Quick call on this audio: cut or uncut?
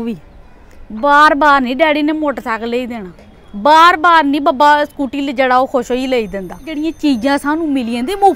cut